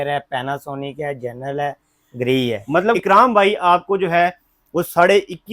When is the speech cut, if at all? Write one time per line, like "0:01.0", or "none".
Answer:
0:03.0